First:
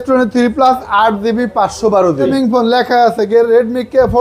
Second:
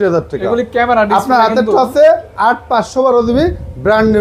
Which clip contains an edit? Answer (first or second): first